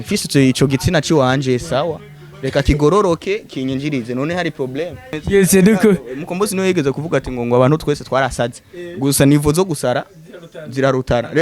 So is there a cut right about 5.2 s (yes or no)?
yes